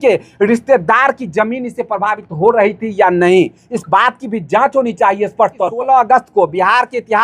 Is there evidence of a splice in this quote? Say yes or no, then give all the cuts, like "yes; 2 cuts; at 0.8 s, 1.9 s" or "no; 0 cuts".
yes; 1 cut; at 5.7 s